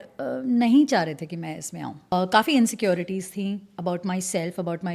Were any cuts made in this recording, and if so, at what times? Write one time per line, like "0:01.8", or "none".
0:02.1